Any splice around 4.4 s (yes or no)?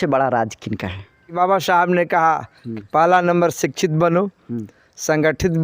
no